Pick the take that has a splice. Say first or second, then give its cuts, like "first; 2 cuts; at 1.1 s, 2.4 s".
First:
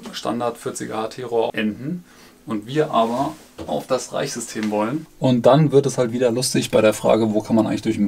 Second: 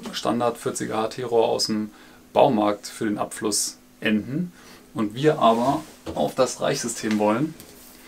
first; 2 cuts; at 1.5 s, 5.1 s